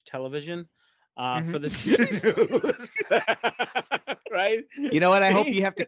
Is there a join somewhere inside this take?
no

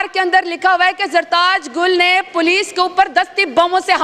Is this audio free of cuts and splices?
yes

